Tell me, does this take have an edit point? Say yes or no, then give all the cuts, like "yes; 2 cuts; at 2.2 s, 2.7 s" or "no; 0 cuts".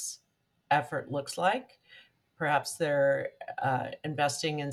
no; 0 cuts